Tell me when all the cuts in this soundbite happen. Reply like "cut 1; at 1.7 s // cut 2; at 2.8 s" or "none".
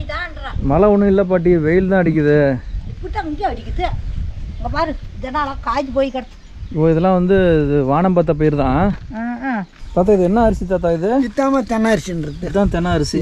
cut 1; at 9.7 s